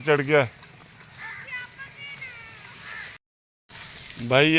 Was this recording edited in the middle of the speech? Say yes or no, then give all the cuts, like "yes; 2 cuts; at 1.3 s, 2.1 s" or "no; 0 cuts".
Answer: yes; 1 cut; at 3.2 s